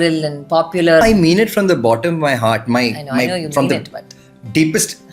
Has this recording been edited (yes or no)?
yes